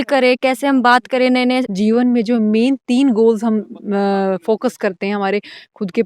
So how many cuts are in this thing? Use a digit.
1